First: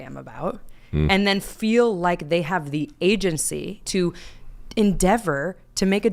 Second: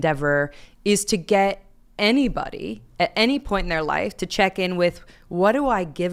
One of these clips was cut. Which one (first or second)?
first